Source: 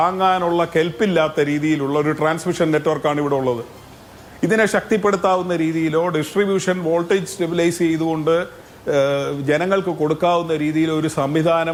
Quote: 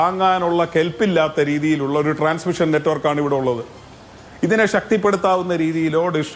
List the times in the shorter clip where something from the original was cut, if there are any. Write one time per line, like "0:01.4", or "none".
none